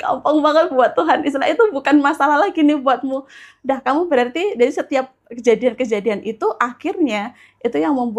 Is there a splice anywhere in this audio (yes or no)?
no